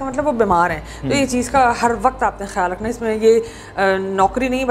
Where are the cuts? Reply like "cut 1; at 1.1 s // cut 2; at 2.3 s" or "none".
none